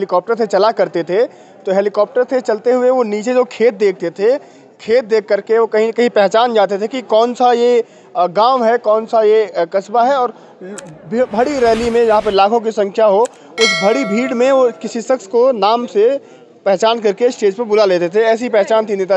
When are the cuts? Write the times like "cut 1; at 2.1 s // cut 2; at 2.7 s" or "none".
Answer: none